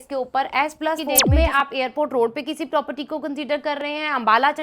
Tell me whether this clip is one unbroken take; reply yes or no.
no